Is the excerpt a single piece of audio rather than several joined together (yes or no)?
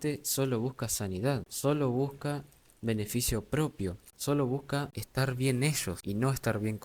no